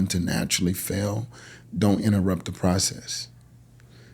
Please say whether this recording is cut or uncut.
cut